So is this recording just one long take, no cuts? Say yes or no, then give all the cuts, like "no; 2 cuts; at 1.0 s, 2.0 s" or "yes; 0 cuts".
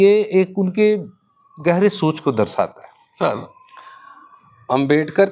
yes; 0 cuts